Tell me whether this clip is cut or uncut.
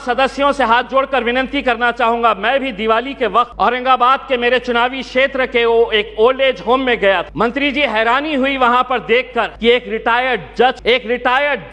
cut